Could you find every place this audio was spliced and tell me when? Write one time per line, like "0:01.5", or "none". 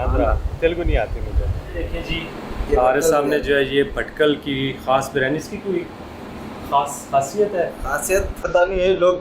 0:01.9